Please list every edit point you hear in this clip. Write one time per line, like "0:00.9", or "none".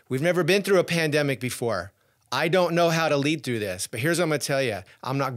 none